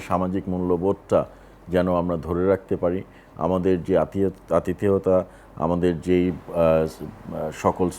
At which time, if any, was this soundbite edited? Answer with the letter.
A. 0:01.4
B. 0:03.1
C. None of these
C